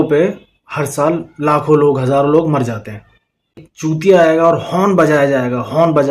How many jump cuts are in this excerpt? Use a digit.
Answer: 1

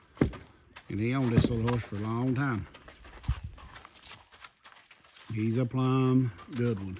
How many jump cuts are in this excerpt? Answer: 0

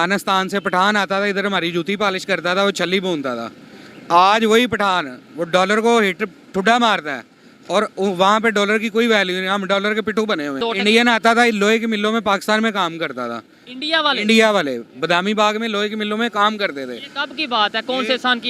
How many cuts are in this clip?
1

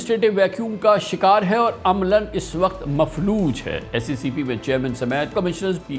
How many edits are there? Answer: 1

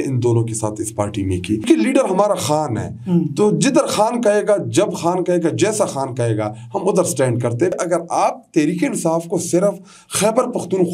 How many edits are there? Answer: 2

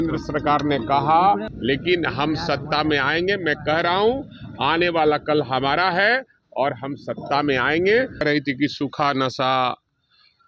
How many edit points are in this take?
2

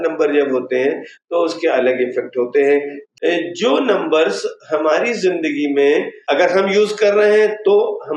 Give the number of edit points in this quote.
1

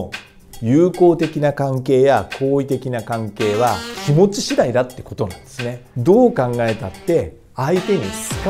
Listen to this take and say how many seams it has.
2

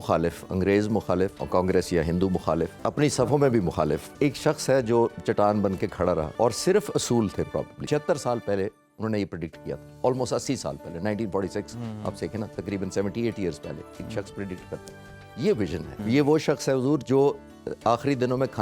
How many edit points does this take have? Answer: 6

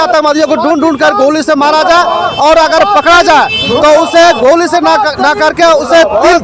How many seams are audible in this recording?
0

